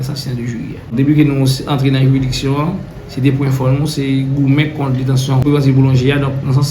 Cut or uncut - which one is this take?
cut